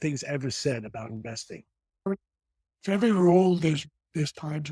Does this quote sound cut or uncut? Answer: cut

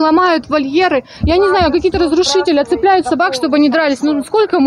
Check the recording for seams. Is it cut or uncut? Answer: uncut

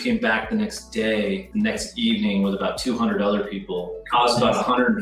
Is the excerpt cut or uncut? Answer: cut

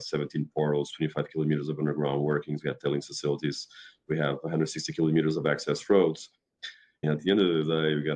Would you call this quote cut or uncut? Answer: cut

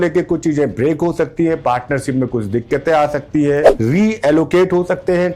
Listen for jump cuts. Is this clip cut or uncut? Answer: cut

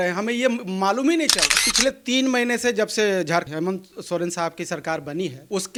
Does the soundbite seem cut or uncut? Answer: uncut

